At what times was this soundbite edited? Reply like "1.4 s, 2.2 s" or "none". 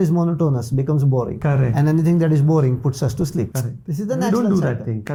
none